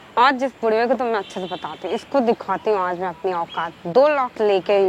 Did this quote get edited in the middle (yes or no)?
no